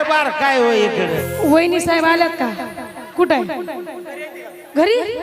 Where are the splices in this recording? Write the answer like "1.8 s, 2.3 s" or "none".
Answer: 1.3 s